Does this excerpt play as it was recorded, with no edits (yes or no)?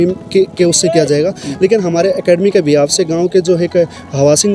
yes